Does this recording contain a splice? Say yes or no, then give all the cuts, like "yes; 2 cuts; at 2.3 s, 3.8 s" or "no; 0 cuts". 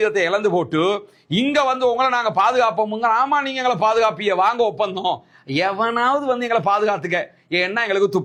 no; 0 cuts